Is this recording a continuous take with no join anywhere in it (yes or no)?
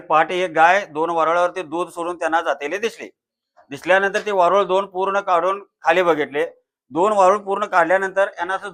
yes